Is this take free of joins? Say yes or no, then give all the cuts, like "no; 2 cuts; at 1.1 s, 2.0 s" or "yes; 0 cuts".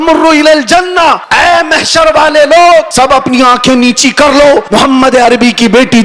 no; 3 cuts; at 1.2 s, 2.9 s, 4.6 s